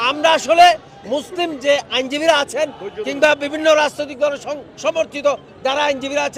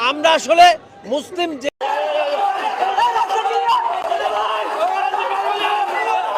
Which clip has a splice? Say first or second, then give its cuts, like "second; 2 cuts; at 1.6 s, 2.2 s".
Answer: second; 1 cut; at 1.6 s